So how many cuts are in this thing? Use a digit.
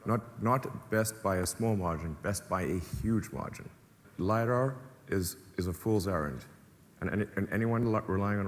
1